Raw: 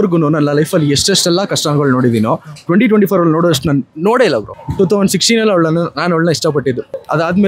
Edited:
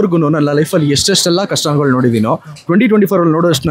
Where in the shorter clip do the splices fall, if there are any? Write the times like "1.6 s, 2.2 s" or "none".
none